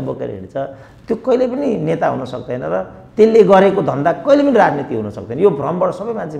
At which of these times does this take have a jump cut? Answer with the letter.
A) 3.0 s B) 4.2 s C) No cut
C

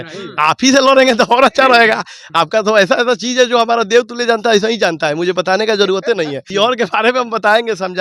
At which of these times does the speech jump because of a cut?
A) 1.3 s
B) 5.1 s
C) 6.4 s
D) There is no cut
C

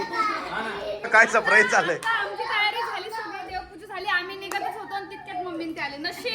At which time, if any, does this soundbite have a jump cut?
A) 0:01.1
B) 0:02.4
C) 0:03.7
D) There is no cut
A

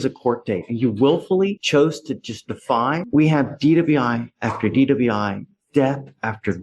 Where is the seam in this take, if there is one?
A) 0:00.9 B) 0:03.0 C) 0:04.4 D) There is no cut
B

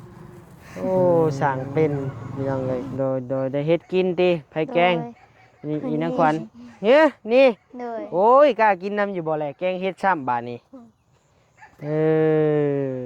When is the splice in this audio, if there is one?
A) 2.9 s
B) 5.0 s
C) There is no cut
A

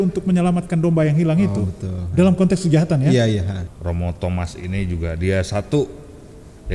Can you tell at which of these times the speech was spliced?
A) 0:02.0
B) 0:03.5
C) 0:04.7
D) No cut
B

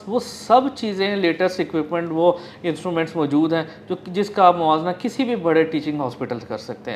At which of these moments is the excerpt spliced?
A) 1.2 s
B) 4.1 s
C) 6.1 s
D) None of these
D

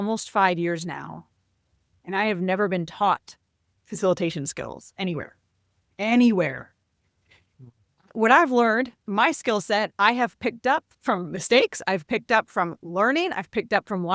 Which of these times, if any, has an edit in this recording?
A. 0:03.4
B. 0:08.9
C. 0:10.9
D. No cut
C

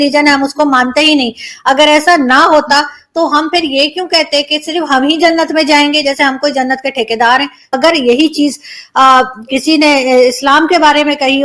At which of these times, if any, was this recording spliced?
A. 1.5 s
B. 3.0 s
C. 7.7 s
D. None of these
C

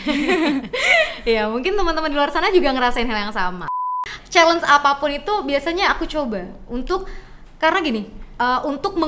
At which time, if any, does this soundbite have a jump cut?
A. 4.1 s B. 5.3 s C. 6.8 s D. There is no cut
A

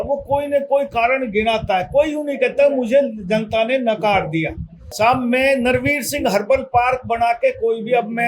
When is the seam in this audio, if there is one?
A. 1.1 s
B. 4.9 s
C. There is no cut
B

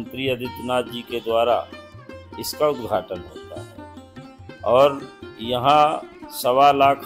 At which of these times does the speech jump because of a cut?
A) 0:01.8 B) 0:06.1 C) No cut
C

